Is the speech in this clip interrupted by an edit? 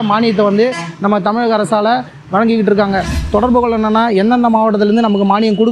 yes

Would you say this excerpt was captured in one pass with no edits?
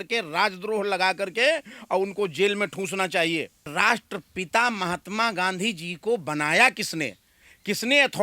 no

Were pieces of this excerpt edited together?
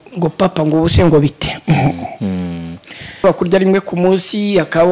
yes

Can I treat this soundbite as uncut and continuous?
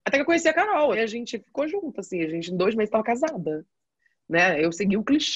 no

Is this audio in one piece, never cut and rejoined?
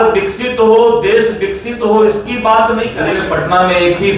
no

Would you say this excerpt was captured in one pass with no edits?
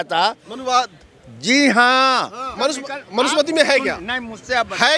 no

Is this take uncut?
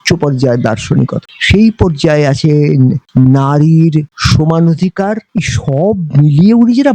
no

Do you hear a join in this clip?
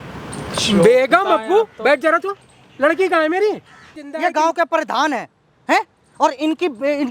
yes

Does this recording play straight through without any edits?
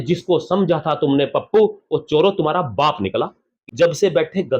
no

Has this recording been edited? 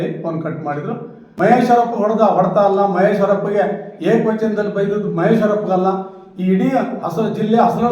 yes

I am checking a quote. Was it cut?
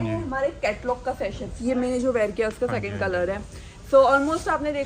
yes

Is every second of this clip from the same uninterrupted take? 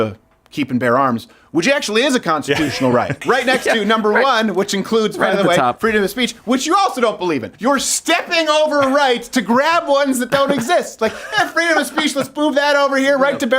no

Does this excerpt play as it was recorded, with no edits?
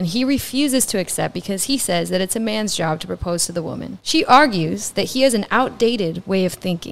no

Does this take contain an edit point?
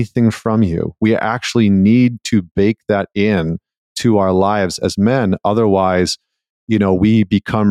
no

